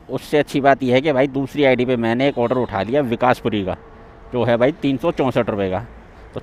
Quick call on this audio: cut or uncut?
uncut